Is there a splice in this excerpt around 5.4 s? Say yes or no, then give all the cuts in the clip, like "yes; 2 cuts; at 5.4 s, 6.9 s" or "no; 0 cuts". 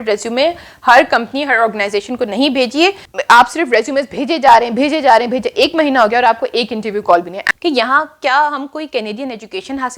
no; 2 cuts; at 3.1 s, 7.4 s